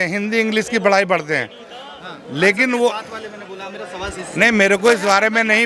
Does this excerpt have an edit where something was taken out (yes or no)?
no